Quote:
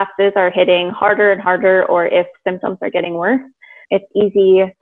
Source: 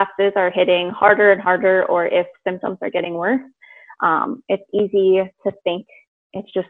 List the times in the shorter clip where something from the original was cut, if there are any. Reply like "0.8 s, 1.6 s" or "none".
3.8 s